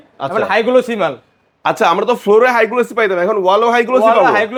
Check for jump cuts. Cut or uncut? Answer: uncut